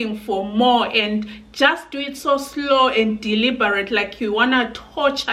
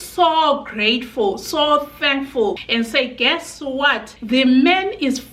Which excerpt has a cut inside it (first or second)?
second